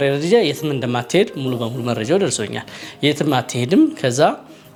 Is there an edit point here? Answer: no; 0 cuts

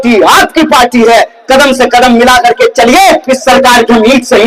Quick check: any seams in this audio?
no; 0 cuts

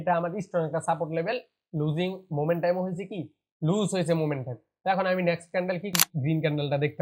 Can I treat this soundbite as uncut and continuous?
no; 1 cut; at 5.9 s

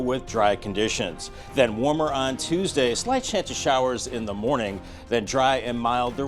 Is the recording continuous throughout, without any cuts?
yes; 0 cuts

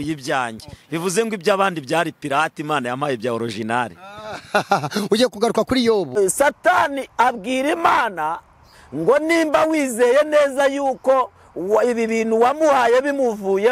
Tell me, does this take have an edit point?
yes; 1 cut; at 6.2 s

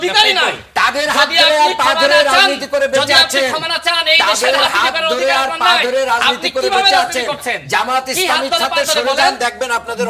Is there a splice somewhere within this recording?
no; 0 cuts

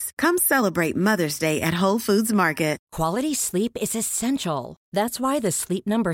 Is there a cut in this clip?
yes; 1 cut; at 2.9 s

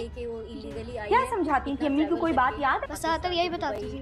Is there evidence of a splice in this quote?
yes; 1 cut; at 2.9 s

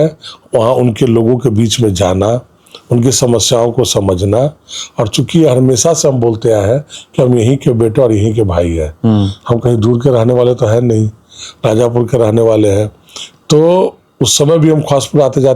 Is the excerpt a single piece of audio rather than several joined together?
yes; 0 cuts

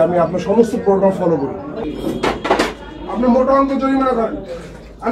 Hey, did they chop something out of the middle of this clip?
yes; 1 cut; at 1.8 s

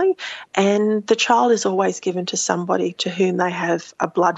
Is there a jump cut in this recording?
no; 0 cuts

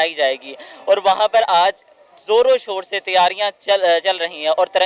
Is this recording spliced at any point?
no; 0 cuts

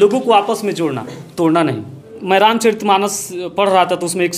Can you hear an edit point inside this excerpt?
yes; 1 cut; at 2.1 s

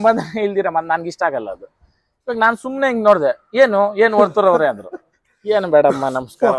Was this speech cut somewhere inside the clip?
no; 0 cuts

